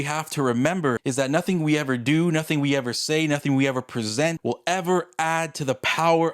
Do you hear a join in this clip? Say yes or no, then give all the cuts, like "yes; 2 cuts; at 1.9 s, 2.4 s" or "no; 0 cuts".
yes; 2 cuts; at 1.0 s, 4.4 s